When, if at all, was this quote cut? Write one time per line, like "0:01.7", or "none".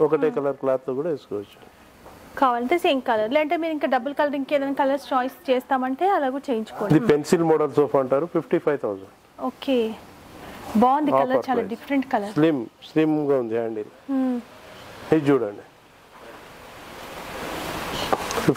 none